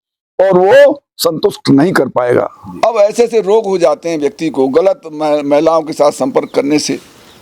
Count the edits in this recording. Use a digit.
1